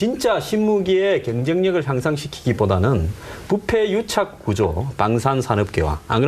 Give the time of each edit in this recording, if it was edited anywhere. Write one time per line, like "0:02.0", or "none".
0:05.3

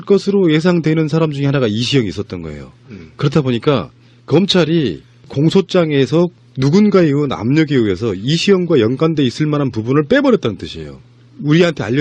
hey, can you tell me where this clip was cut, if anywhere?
0:07.6

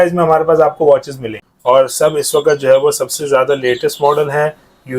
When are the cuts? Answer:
0:01.4

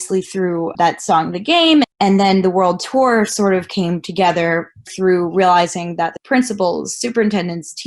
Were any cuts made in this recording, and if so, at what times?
0:01.9
0:04.9
0:06.2

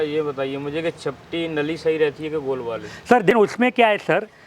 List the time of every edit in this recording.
0:03.3

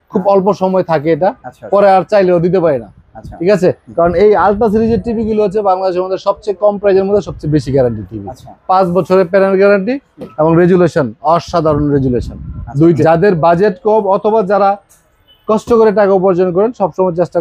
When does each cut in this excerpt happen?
0:13.0

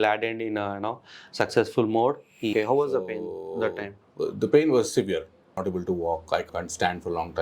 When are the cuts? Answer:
0:02.5
0:05.5
0:06.5

